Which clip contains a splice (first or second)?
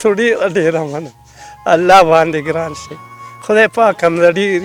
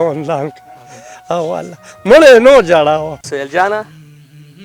second